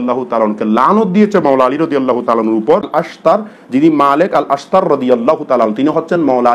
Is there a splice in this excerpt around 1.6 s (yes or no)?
no